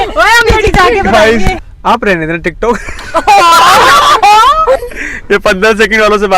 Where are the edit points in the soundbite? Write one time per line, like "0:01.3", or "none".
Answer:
0:01.6
0:04.8